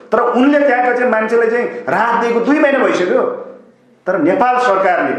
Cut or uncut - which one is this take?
uncut